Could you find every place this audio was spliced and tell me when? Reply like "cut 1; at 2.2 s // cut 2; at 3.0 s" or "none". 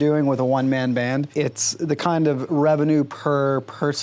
none